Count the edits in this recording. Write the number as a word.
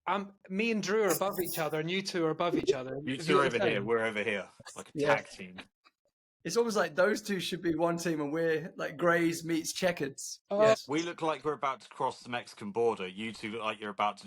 one